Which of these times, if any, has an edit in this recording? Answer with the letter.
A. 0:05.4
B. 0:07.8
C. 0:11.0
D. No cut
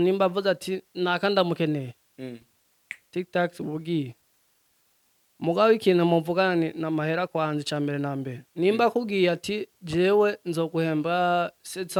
D